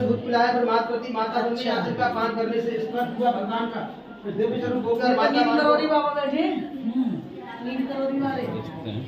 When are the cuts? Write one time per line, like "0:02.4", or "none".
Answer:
none